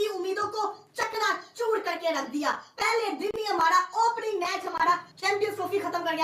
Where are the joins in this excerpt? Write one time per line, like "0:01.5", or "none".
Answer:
0:05.1